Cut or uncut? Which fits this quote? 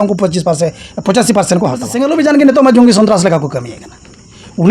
cut